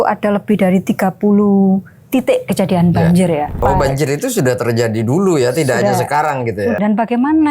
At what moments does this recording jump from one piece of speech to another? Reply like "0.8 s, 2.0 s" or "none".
3.6 s, 6.8 s